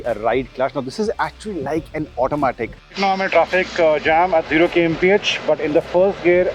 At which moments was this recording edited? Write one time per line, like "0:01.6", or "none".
0:02.8

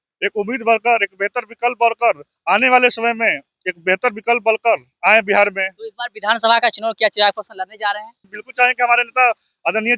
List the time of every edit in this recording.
0:08.4

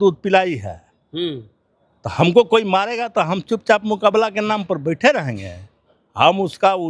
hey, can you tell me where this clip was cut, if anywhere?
none

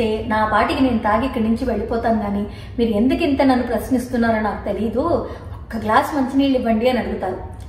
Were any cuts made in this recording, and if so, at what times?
none

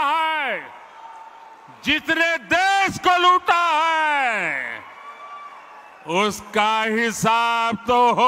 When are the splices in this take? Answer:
none

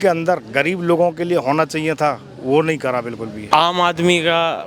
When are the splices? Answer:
0:03.4

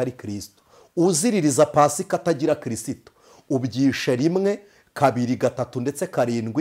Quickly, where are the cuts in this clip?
none

